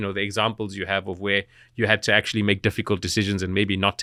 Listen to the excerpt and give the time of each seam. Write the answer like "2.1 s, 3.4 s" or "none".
none